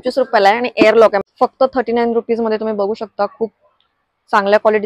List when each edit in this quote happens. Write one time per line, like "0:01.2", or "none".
0:01.2